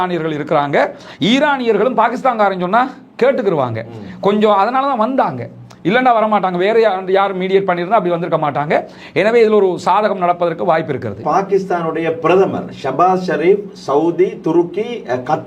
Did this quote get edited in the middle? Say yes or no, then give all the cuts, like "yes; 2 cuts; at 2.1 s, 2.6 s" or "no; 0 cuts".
no; 0 cuts